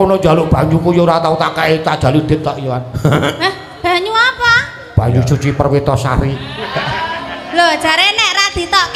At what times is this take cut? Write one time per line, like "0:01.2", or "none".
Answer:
none